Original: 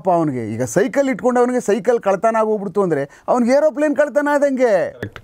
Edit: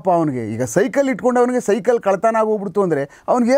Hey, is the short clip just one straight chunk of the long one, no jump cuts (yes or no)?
yes